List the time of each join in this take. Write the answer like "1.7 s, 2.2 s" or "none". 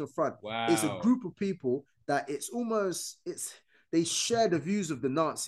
none